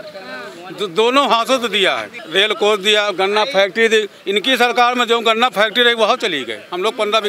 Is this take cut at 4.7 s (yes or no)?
no